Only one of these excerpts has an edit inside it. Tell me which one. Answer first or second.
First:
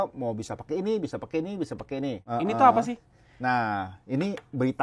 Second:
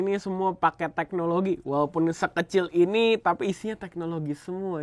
first